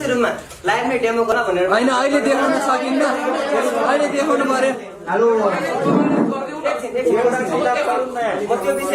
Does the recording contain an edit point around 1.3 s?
yes; 1 cut; at 1.3 s

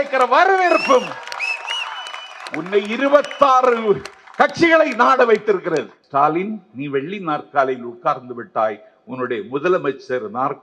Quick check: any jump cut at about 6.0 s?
yes; 1 cut; at 6.0 s

